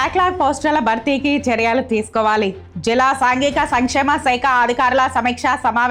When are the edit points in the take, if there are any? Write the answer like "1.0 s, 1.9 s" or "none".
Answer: none